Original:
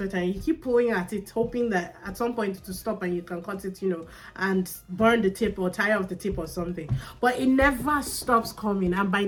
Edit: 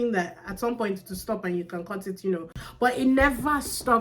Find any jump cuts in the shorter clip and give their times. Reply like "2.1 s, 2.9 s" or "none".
2.6 s